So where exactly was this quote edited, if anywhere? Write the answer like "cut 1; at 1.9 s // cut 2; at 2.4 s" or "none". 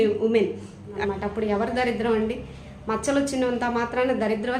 cut 1; at 1.0 s